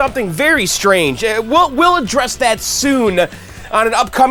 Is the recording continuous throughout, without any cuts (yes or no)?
yes